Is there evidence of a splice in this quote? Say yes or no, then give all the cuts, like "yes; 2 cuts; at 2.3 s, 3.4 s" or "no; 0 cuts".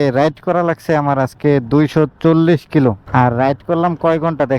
no; 0 cuts